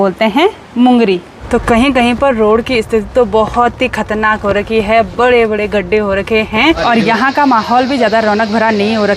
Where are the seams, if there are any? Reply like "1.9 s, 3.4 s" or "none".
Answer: 1.3 s, 6.8 s